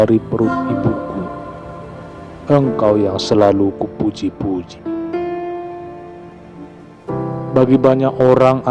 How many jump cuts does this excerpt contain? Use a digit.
4